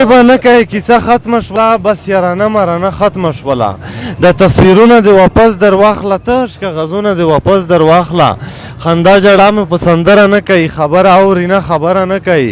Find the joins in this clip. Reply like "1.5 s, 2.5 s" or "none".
1.6 s